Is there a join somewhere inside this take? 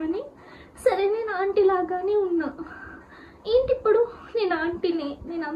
no; 0 cuts

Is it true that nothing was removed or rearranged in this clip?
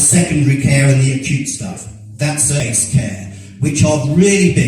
no; 1 cut; at 2.6 s

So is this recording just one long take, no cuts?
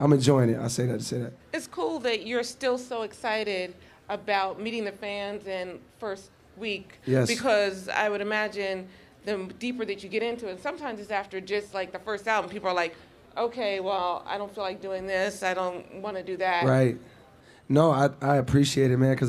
no; 1 cut; at 13.3 s

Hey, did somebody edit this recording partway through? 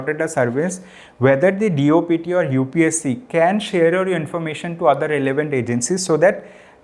no; 0 cuts

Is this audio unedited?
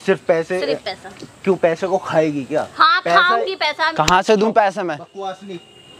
yes; 0 cuts

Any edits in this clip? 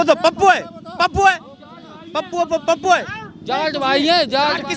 no; 0 cuts

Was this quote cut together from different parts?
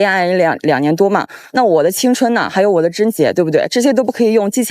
yes; 1 cut; at 1.4 s

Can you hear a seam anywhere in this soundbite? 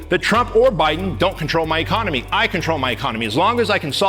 no; 0 cuts

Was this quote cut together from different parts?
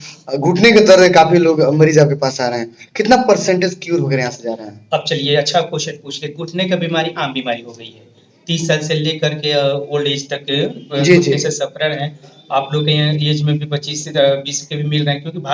no; 0 cuts

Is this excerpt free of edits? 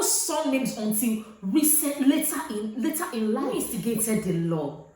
no; 1 cut; at 3.6 s

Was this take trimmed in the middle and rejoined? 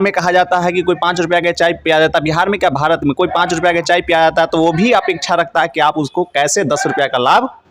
no; 0 cuts

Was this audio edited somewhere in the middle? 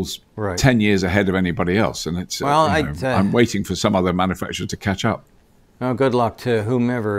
no; 0 cuts

